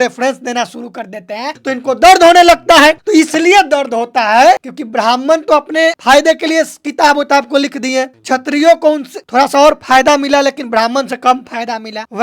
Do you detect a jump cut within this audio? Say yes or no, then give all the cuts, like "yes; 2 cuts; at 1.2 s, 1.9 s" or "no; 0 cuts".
yes; 3 cuts; at 1.6 s, 4.8 s, 6.0 s